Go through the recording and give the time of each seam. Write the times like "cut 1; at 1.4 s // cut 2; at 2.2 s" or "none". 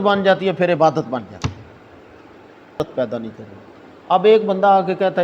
cut 1; at 2.8 s